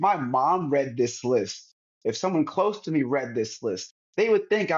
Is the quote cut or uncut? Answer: uncut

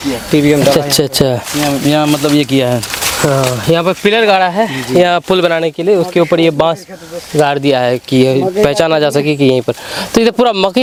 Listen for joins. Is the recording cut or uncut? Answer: uncut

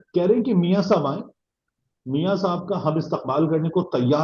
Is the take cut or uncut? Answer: uncut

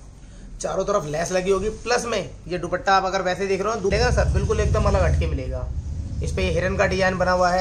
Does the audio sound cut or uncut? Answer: cut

